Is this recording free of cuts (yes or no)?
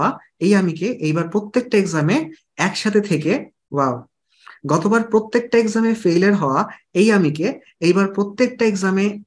yes